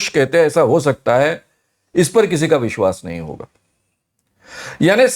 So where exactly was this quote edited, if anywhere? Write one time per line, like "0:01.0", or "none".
none